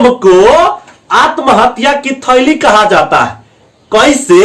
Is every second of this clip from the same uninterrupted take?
yes; 0 cuts

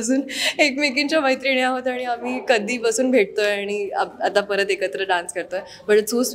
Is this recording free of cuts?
yes; 0 cuts

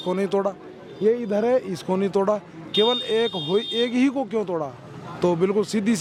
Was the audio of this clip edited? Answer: no; 0 cuts

